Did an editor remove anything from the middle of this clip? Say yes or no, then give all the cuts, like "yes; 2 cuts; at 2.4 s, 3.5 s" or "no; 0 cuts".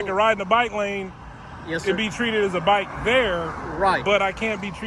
no; 0 cuts